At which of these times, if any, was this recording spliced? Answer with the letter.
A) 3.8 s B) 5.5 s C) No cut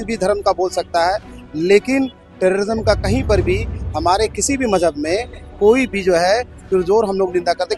C